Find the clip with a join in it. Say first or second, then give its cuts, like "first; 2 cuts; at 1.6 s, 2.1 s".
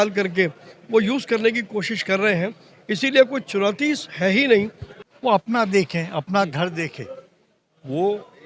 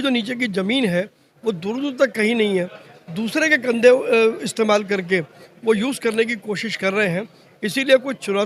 first; 1 cut; at 5.2 s